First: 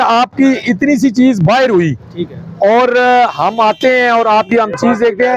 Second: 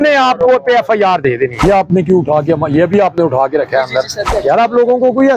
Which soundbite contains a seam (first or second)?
second